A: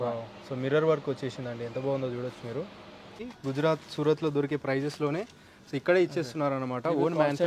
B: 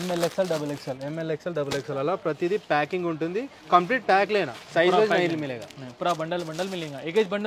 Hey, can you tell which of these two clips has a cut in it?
A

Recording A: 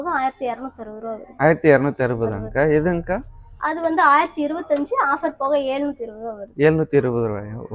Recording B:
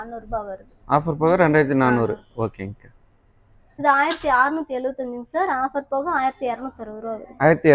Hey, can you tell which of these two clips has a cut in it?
B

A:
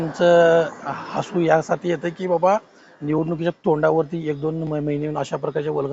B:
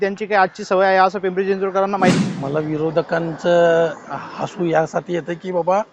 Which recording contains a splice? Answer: B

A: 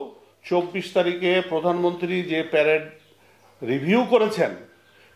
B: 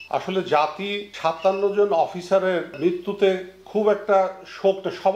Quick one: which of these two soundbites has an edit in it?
B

